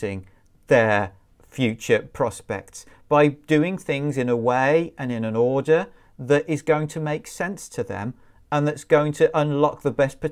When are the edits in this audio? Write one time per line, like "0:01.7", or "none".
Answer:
none

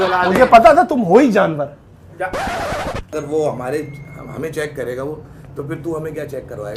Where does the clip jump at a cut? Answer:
0:03.1

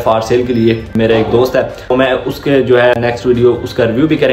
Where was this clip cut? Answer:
0:00.9
0:01.9
0:03.0

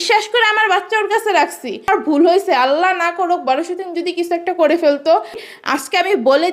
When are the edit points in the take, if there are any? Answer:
0:01.9
0:05.5

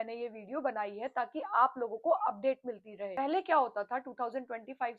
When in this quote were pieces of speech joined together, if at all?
0:03.0

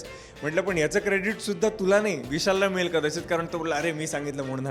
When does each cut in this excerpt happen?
none

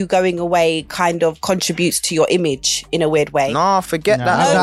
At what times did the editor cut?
none

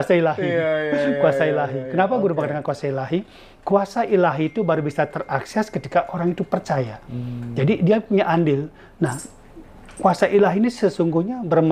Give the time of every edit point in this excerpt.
none

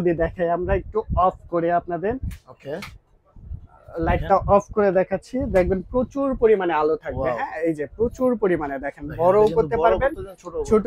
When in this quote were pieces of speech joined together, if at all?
none

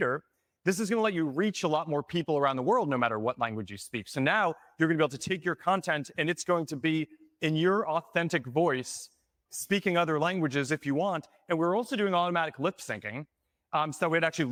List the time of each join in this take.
none

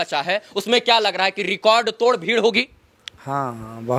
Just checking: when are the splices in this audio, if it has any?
none

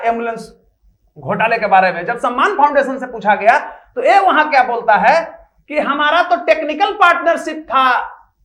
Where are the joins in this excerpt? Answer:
none

